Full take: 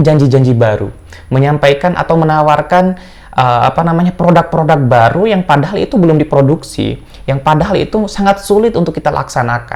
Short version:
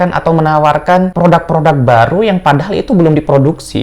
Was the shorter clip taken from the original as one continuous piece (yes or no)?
no